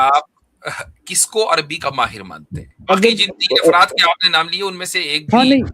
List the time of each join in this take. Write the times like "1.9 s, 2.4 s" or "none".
2.7 s